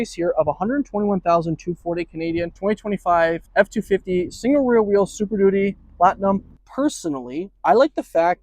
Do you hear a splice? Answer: yes; 3 cuts; at 2.5 s, 3.4 s, 6.6 s

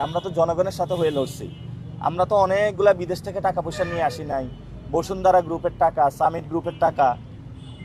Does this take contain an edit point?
no; 0 cuts

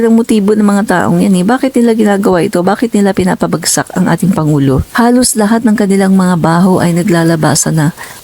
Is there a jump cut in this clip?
yes; 1 cut; at 4.9 s

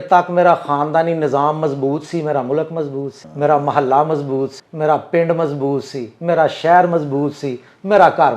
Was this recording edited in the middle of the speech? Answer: yes; 2 cuts; at 3.2 s, 4.6 s

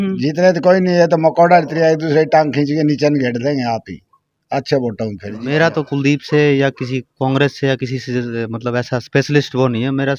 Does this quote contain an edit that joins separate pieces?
yes; 1 cut; at 5.5 s

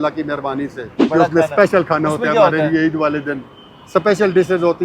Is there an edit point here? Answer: yes; 1 cut; at 1.0 s

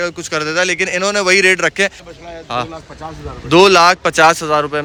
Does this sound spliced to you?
no; 0 cuts

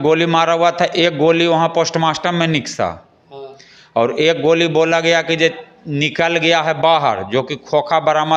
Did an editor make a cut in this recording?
no; 0 cuts

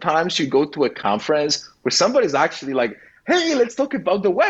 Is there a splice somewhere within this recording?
no; 0 cuts

